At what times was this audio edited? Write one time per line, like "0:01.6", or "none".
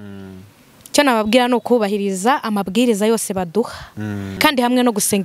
0:04.3